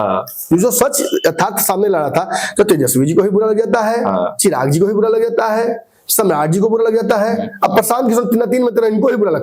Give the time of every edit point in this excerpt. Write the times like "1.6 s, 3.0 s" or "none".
none